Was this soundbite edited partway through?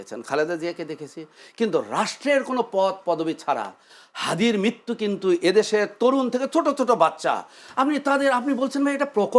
no; 0 cuts

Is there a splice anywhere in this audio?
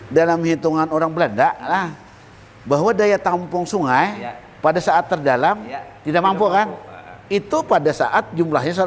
no; 0 cuts

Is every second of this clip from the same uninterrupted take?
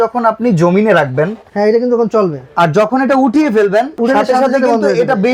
no; 2 cuts; at 1.4 s, 3.9 s

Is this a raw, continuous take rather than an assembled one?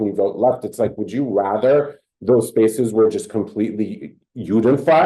yes; 0 cuts

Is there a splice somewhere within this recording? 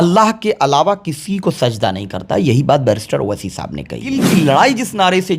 yes; 1 cut; at 4.2 s

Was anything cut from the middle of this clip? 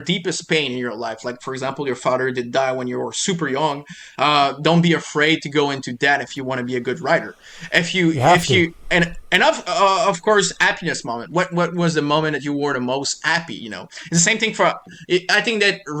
no; 0 cuts

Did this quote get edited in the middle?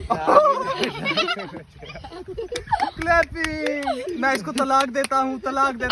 no; 0 cuts

